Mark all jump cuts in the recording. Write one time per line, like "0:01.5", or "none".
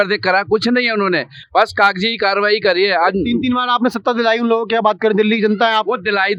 none